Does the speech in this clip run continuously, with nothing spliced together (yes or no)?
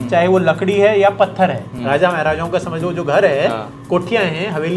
no